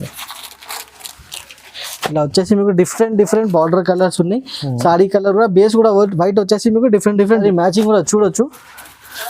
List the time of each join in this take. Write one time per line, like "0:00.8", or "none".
0:07.4